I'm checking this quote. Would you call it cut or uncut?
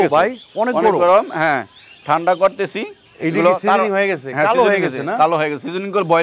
uncut